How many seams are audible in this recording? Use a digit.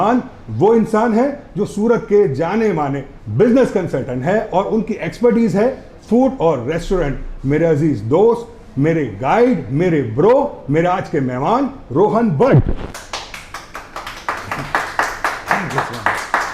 0